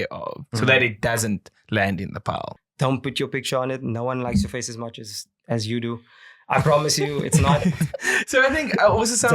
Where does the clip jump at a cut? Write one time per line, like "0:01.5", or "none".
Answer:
0:02.5